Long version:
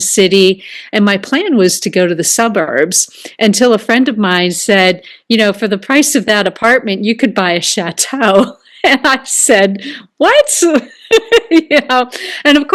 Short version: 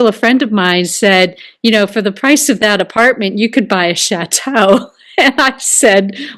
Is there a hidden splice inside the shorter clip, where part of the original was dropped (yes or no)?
no